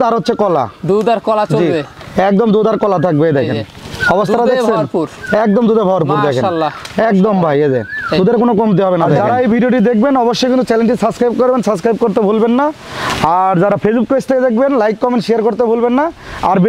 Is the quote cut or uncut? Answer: cut